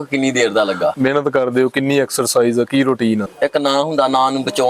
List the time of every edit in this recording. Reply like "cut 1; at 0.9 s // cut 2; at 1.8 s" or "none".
cut 1; at 0.9 s // cut 2; at 3.2 s